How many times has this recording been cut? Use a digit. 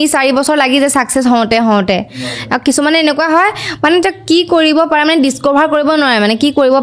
0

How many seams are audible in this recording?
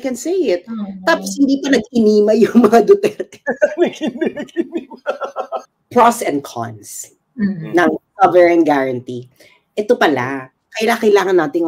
1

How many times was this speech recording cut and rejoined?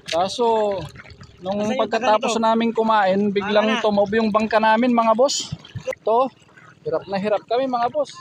1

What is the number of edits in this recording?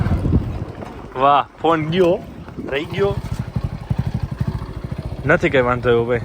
1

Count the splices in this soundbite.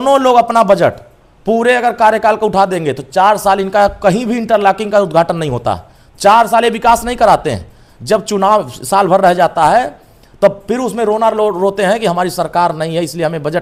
0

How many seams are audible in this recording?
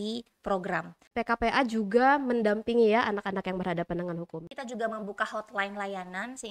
2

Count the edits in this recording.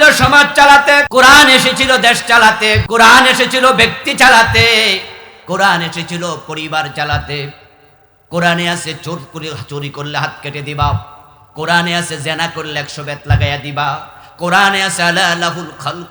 2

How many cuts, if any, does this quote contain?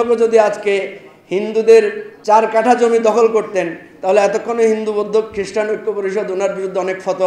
1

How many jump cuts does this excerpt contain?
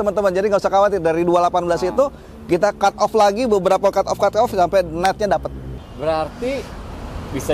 1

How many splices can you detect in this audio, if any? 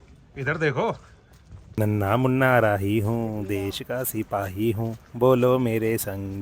1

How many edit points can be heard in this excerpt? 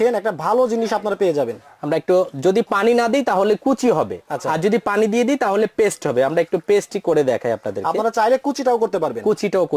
0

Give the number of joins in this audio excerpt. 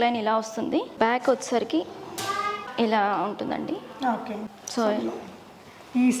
3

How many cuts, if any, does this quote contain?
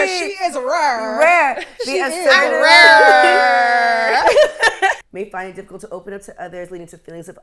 1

